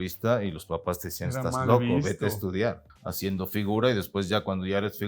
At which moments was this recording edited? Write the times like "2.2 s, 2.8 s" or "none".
2.9 s